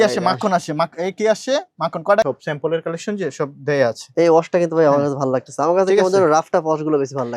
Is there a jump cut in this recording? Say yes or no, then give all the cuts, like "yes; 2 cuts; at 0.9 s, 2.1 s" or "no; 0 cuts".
yes; 1 cut; at 2.2 s